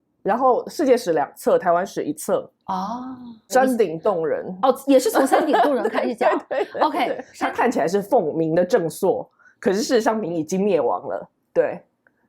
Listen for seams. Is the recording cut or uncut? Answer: cut